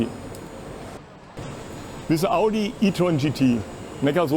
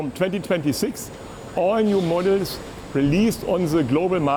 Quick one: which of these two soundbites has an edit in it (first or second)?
first